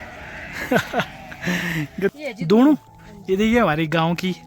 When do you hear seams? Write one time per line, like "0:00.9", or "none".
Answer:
0:02.1